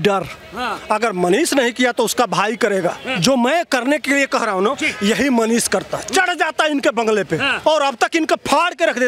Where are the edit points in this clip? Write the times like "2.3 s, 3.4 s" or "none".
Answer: 3.1 s, 7.5 s